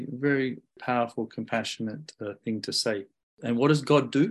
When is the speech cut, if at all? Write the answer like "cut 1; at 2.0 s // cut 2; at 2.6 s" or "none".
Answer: cut 1; at 0.8 s // cut 2; at 3.3 s